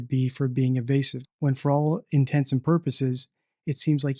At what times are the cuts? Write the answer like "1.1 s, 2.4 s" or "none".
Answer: 1.2 s